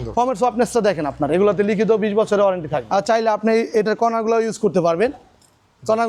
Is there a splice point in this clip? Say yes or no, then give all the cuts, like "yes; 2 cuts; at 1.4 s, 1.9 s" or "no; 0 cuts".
yes; 1 cut; at 2.8 s